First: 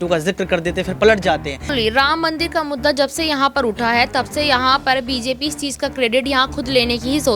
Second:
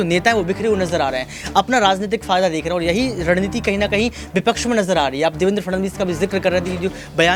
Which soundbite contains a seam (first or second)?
first